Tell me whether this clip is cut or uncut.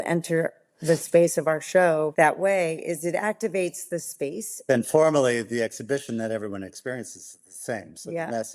cut